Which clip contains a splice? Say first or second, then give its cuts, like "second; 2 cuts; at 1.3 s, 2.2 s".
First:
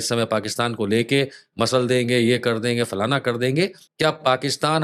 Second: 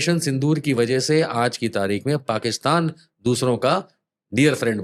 first; 1 cut; at 3.8 s